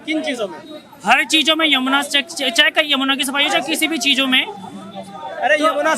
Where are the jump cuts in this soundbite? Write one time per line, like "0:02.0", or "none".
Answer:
none